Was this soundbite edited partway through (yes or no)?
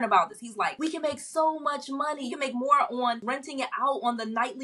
yes